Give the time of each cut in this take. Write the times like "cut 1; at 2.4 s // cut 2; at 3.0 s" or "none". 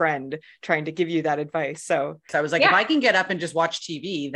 cut 1; at 2.3 s